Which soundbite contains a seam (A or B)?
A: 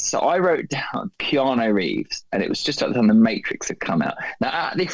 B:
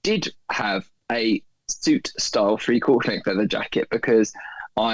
A